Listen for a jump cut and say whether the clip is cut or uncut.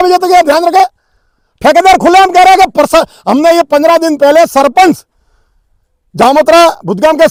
uncut